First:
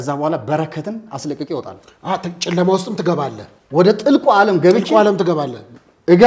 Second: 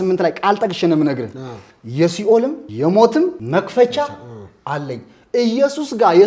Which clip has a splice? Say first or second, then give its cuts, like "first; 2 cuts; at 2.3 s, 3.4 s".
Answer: second; 2 cuts; at 2.6 s, 3.4 s